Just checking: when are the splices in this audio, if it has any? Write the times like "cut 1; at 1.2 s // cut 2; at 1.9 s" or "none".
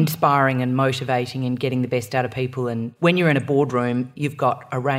cut 1; at 2.9 s // cut 2; at 4.1 s